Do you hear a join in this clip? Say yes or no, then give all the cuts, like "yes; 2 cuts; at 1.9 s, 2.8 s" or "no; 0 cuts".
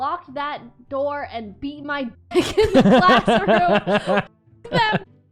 no; 0 cuts